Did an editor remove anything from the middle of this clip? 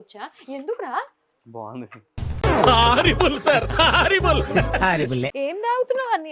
yes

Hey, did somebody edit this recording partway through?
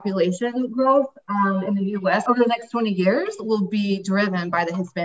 no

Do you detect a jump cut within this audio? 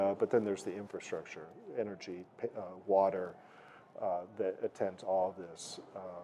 no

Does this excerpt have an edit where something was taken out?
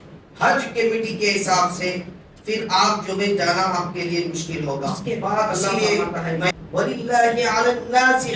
yes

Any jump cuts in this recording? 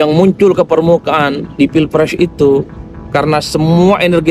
no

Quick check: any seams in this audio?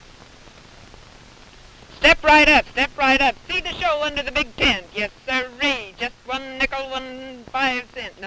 no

